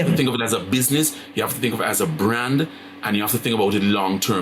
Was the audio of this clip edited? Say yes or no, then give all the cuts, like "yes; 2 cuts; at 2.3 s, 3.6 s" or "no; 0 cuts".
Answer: no; 0 cuts